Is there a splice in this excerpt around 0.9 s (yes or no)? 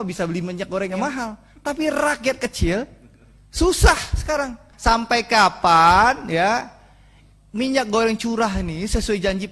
yes